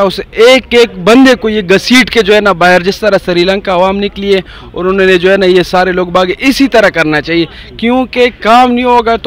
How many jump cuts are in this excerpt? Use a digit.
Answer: 0